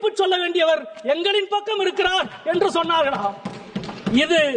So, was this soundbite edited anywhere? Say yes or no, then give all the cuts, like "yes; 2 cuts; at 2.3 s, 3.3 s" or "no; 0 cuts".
no; 0 cuts